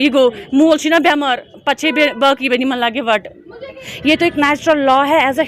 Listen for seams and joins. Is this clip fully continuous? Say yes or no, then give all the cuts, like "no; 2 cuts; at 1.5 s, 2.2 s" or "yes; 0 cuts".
no; 1 cut; at 3.9 s